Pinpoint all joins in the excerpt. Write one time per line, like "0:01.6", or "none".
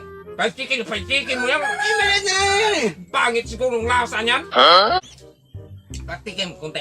0:05.0